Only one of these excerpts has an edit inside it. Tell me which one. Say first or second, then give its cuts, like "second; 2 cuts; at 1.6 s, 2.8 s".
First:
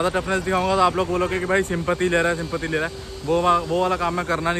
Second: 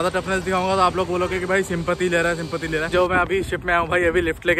second; 1 cut; at 2.9 s